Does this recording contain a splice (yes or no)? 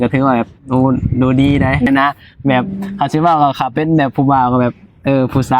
yes